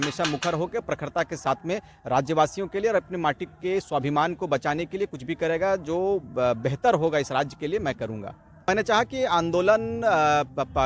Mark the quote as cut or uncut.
cut